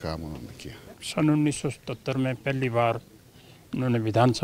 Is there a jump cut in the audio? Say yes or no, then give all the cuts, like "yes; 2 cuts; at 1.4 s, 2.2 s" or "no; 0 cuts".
no; 0 cuts